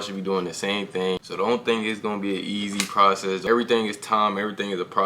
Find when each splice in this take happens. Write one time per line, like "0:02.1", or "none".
0:01.3
0:03.4

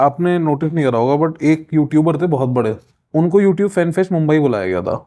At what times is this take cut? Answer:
0:02.9

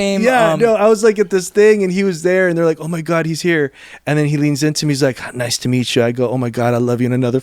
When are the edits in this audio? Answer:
none

